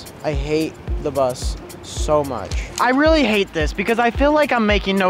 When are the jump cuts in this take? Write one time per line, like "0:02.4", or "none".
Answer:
0:02.7